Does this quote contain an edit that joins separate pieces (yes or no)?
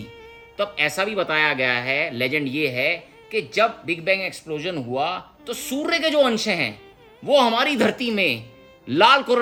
no